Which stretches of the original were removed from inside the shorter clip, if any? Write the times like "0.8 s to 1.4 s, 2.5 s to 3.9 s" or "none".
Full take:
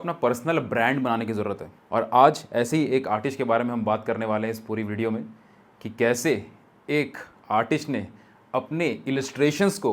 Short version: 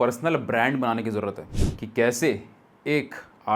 1.7 s to 5.5 s